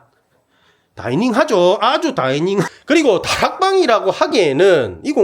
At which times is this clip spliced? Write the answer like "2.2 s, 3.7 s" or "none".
2.7 s